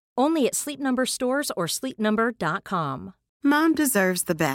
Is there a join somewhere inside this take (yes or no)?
yes